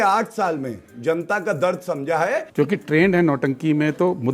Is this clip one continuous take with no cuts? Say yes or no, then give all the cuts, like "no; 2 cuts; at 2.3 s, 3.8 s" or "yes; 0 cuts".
no; 1 cut; at 2.5 s